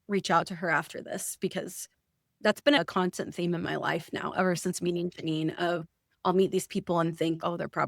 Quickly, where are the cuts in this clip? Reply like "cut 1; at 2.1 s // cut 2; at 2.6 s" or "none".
cut 1; at 2.8 s

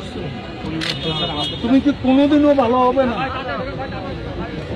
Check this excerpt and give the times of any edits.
none

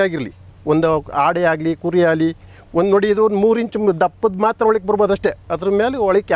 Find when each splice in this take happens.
none

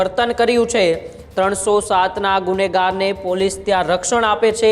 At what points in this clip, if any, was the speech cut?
none

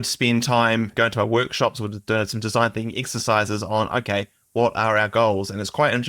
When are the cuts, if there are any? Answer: cut 1; at 0.9 s

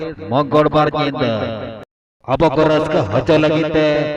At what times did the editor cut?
cut 1; at 2.3 s

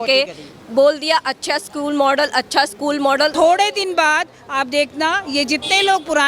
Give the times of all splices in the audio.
cut 1; at 3.3 s

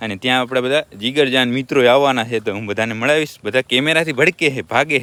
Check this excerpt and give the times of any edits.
none

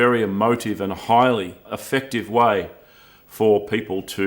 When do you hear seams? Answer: cut 1; at 1.7 s

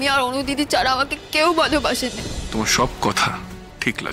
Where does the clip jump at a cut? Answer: cut 1; at 2.2 s

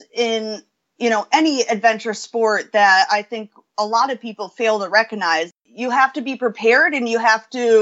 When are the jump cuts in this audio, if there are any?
cut 1; at 5.5 s

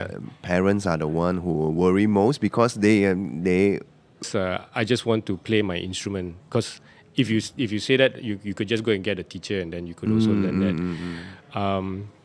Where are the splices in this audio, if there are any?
cut 1; at 4.3 s

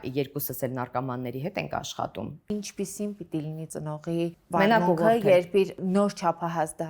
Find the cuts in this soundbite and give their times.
cut 1; at 2.5 s // cut 2; at 4.0 s // cut 3; at 5.8 s

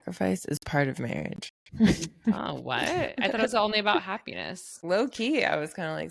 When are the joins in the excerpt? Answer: cut 1; at 4.7 s

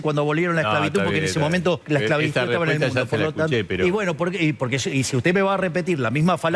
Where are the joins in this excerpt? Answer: cut 1; at 1.8 s

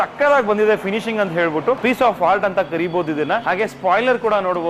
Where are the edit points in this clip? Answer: cut 1; at 1.8 s // cut 2; at 3.4 s

